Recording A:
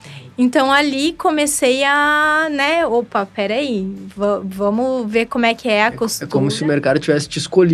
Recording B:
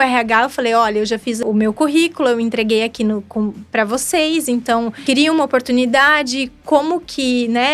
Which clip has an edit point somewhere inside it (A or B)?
B